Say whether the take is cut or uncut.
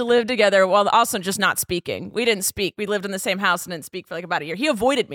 uncut